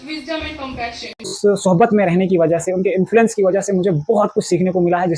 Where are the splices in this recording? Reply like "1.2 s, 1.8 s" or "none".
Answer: 1.4 s